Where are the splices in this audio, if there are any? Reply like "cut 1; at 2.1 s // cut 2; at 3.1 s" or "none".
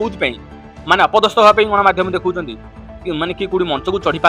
none